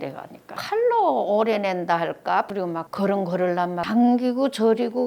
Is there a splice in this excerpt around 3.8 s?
yes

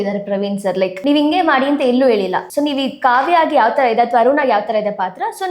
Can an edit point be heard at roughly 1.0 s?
yes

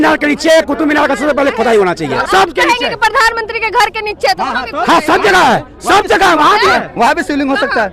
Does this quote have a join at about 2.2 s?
yes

